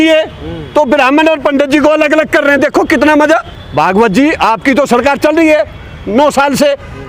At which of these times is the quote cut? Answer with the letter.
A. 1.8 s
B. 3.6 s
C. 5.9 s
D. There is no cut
B